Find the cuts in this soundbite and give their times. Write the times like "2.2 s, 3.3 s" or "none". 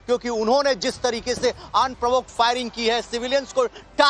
1.4 s